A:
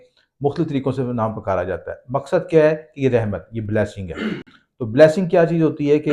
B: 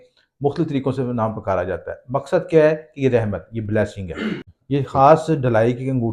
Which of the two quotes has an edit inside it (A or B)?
B